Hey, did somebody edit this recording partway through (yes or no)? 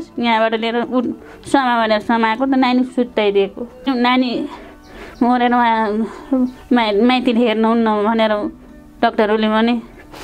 yes